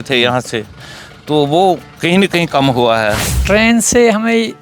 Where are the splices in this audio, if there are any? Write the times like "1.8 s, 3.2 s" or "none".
3.3 s